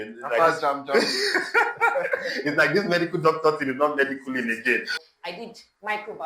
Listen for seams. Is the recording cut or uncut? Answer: cut